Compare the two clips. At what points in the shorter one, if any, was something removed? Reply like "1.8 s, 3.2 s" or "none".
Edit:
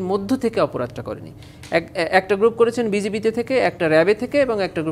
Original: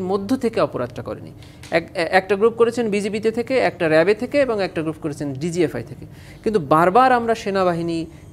none